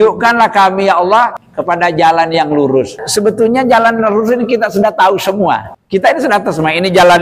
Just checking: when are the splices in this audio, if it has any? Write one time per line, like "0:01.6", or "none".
0:01.5
0:03.0
0:05.7